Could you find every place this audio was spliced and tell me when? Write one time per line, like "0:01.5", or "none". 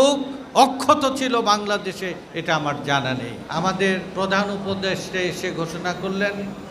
0:03.4